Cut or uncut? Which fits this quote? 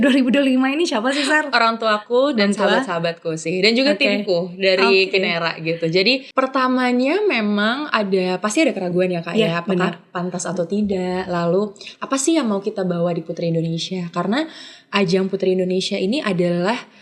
cut